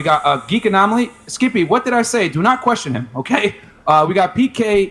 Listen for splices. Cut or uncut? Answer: uncut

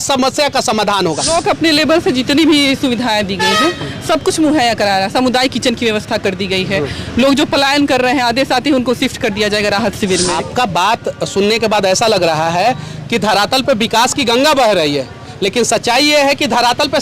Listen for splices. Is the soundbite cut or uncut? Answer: cut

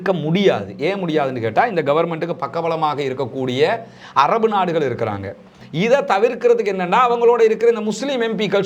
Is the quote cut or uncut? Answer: cut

